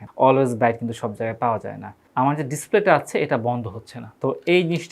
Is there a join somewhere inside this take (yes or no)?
yes